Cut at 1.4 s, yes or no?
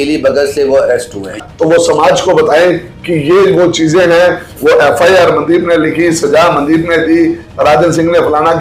yes